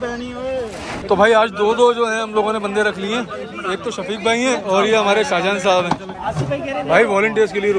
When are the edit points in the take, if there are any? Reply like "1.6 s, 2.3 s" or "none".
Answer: 1.0 s, 4.6 s, 6.1 s